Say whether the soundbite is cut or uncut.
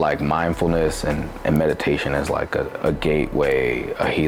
uncut